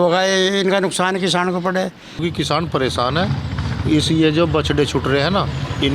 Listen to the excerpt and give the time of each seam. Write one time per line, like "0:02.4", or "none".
0:02.2